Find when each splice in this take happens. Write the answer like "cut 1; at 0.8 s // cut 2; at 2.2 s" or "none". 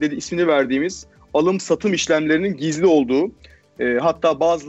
none